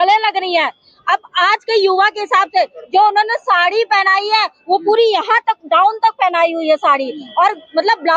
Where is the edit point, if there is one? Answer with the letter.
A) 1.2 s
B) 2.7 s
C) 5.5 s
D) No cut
D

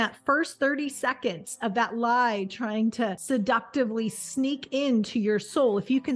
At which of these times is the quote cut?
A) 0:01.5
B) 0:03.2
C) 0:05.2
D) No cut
B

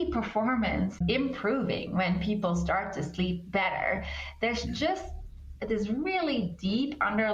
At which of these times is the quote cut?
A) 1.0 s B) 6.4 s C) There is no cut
A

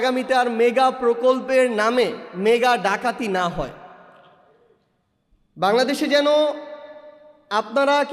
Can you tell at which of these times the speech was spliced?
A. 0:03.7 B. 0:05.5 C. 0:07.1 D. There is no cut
D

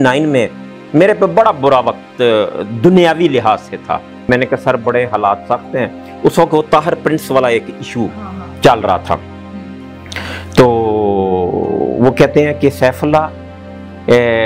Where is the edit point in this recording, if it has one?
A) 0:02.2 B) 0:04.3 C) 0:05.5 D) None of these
B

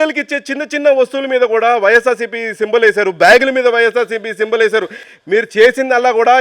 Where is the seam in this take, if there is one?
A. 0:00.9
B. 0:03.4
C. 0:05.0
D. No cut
C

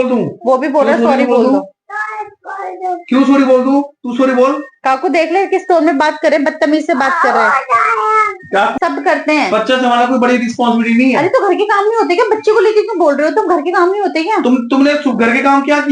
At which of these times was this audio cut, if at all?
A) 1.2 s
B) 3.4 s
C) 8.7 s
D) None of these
C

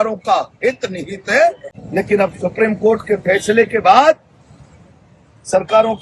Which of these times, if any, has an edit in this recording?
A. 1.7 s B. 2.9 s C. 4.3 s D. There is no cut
A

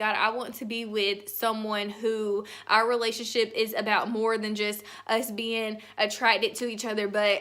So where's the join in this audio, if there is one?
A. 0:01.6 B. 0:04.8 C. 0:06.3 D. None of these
D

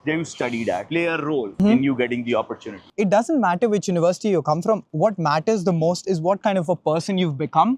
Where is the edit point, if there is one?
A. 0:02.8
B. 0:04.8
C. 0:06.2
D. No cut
A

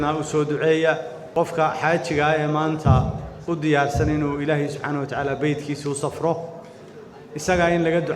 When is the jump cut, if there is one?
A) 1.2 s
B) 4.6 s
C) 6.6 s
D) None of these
A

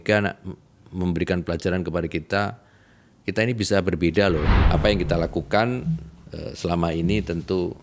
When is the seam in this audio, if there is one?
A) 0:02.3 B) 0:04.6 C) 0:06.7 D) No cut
B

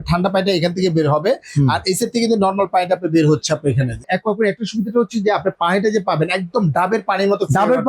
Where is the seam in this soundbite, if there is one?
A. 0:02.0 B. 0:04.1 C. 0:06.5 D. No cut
B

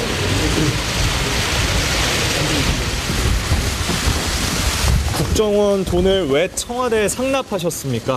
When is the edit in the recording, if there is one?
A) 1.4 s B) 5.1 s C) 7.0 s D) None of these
D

